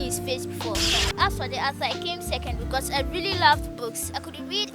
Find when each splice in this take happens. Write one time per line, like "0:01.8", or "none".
0:01.0